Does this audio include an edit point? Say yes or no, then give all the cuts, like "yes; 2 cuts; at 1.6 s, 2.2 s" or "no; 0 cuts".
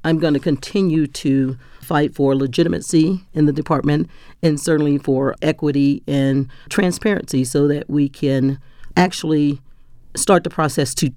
no; 0 cuts